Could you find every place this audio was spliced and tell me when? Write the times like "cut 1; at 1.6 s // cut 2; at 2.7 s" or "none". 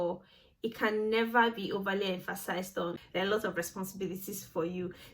cut 1; at 3.0 s